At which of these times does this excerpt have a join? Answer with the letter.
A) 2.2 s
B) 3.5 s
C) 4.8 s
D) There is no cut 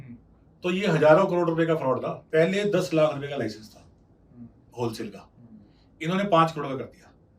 A